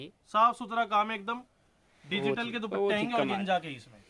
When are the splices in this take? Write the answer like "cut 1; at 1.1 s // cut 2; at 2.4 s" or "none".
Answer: none